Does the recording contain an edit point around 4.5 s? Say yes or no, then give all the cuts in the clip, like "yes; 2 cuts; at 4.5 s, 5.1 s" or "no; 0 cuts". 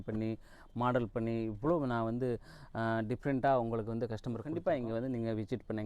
yes; 1 cut; at 4.5 s